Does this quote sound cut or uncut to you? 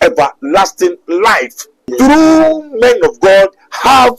cut